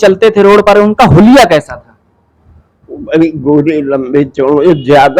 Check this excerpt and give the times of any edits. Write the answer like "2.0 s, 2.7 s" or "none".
none